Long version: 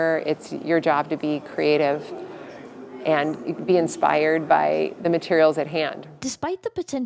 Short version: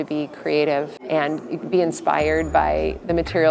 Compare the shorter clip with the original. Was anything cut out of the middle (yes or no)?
yes